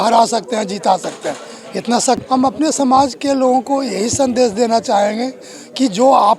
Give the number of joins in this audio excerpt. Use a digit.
1